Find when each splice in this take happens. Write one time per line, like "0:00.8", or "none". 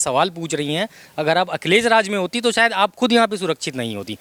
none